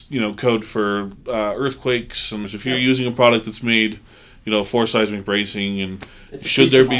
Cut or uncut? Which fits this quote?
cut